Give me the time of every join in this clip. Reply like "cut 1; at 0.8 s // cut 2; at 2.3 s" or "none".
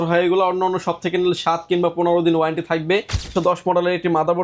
cut 1; at 3.3 s